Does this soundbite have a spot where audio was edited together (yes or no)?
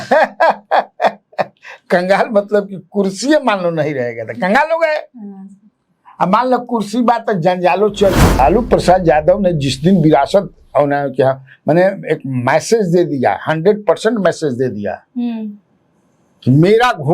yes